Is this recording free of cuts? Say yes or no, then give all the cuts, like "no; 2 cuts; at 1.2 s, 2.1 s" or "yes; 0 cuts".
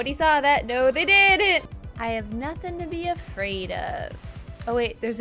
no; 1 cut; at 1.7 s